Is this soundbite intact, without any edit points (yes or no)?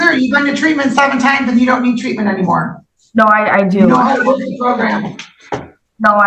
yes